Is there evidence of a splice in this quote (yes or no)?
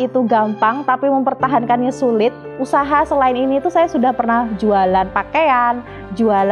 yes